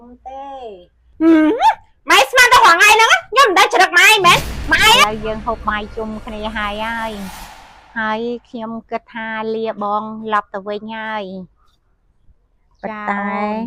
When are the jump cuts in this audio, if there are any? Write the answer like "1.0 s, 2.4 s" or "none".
5.0 s